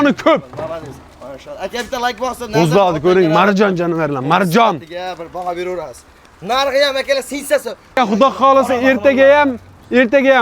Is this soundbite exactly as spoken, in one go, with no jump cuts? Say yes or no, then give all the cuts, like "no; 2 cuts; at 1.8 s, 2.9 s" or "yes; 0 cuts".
no; 1 cut; at 8.0 s